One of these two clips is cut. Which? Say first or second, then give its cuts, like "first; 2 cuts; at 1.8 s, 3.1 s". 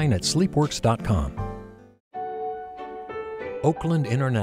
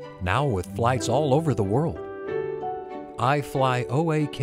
first; 1 cut; at 2.2 s